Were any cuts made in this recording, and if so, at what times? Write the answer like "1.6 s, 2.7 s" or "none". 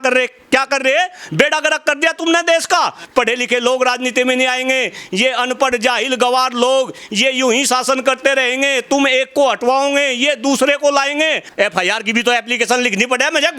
3.0 s, 11.4 s